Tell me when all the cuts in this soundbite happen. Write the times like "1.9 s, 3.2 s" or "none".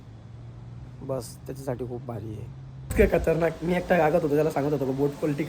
2.9 s